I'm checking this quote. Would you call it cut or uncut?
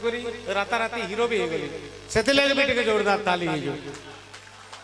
uncut